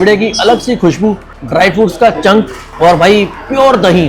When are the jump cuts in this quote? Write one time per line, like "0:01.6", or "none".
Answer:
0:01.3
0:02.6